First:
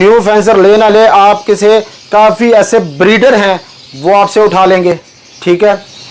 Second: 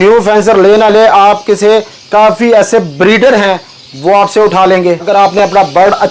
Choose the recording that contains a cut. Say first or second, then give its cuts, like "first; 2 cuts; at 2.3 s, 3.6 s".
second; 1 cut; at 5.1 s